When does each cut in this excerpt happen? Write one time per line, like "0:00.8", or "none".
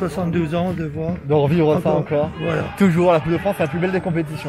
none